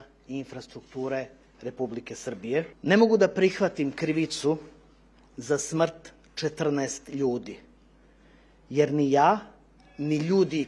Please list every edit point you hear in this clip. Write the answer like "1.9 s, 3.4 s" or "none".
2.7 s